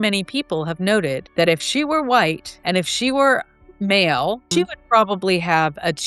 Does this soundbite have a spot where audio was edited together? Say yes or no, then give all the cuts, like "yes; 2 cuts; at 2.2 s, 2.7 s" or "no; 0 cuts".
yes; 3 cuts; at 1.2 s, 2.5 s, 4.4 s